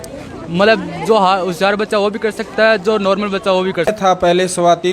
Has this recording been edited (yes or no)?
yes